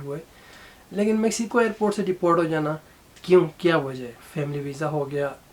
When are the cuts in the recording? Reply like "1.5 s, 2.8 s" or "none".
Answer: 4.2 s